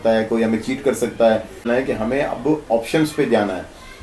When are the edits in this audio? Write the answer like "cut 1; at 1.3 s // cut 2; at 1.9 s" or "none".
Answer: cut 1; at 1.6 s